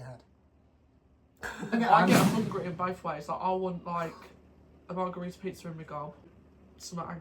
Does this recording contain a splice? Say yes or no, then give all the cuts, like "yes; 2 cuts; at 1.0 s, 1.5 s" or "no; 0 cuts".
yes; 2 cuts; at 1.7 s, 6.3 s